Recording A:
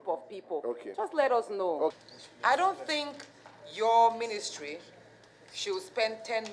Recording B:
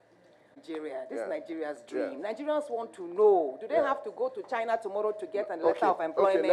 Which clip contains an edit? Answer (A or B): A